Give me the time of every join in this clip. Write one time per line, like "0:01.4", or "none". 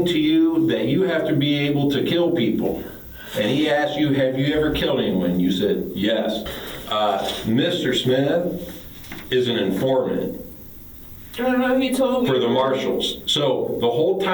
0:06.5